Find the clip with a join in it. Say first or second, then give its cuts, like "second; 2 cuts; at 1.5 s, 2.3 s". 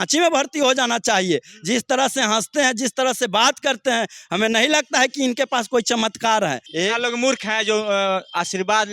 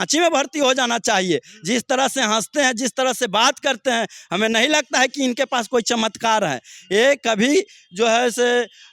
first; 1 cut; at 6.7 s